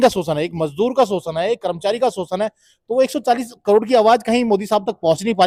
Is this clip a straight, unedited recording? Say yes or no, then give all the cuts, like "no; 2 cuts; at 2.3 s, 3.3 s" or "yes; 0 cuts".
yes; 0 cuts